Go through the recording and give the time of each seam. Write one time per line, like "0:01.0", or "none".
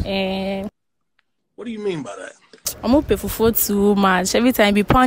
none